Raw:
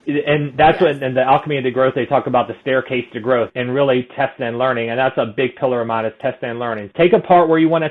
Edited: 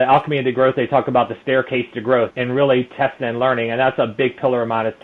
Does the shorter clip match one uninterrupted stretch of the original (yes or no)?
yes